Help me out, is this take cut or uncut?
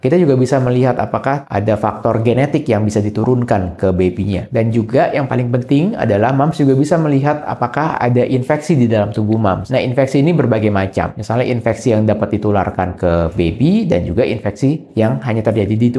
cut